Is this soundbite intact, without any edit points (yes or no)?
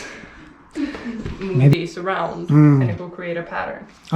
no